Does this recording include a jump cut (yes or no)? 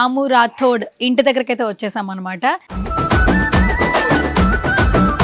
yes